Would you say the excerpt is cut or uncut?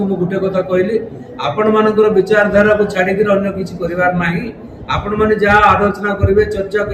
uncut